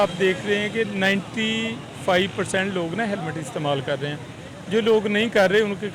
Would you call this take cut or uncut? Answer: uncut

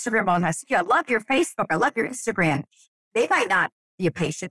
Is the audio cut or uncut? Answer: cut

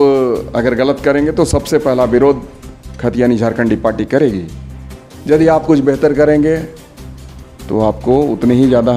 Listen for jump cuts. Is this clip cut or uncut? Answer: uncut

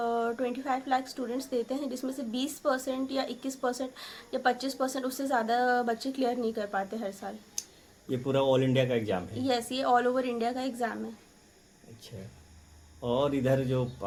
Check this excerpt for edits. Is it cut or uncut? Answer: uncut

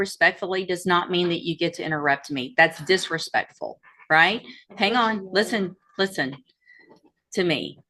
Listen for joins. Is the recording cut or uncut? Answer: uncut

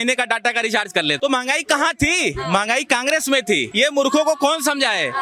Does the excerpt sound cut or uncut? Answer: cut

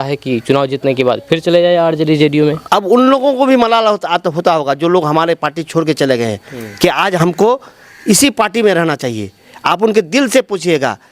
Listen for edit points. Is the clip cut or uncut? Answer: cut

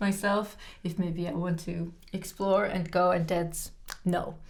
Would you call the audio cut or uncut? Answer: uncut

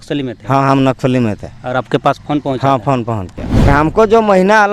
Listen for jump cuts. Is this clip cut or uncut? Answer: cut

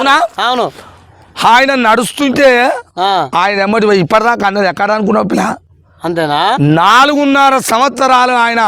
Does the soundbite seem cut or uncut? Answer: uncut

